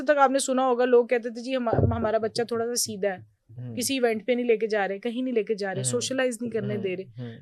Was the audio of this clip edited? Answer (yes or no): no